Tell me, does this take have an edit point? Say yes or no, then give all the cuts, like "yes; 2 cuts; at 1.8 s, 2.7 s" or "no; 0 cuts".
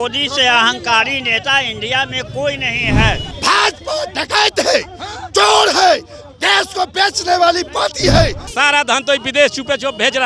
yes; 2 cuts; at 3.3 s, 8.4 s